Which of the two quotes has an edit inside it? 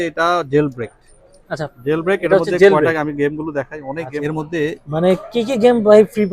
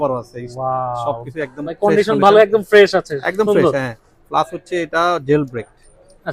first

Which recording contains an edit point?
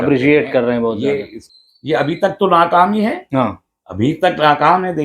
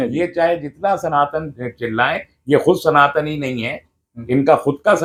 first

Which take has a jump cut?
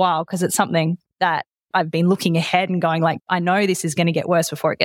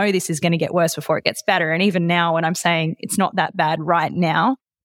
first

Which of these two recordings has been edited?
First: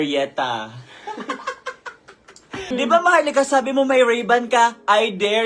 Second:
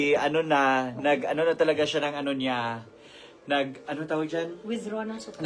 first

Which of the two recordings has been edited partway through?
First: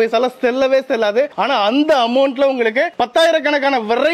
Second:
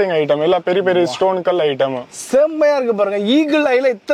second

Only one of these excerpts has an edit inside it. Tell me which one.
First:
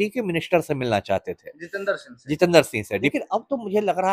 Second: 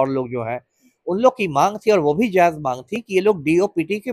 first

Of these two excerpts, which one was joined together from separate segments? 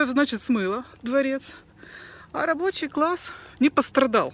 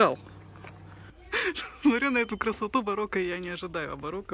second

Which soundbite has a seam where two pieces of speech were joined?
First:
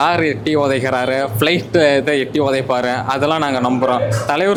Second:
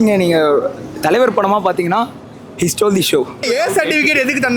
second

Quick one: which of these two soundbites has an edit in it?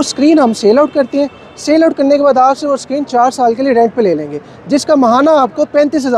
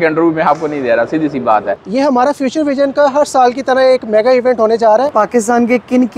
second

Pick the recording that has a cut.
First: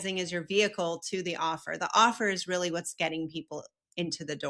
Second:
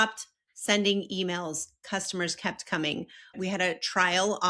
second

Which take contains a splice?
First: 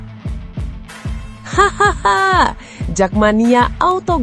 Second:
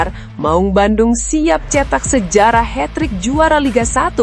first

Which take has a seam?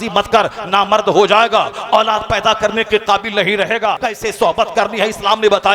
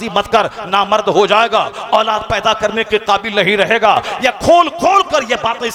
first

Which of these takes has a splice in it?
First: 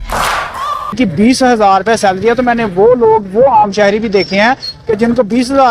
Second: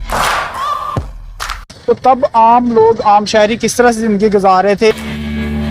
first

